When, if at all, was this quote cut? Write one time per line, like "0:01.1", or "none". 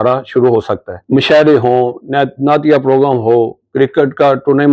0:00.9